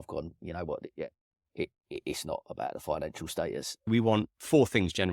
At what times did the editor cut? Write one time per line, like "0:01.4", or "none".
0:03.9